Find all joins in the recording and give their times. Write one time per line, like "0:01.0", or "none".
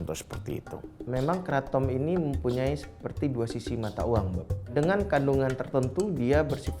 0:01.0